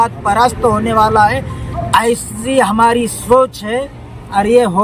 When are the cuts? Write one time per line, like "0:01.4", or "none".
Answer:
none